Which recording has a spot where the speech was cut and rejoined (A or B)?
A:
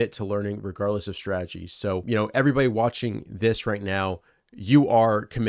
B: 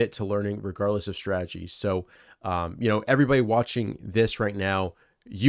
A